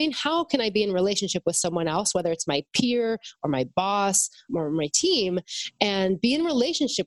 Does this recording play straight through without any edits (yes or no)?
no